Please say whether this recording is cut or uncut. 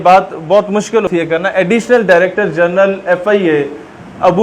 cut